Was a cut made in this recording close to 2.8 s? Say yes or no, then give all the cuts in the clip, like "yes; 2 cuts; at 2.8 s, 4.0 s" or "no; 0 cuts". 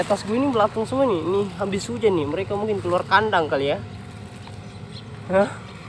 no; 0 cuts